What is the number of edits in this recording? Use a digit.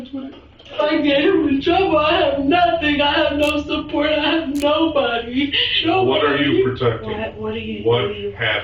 2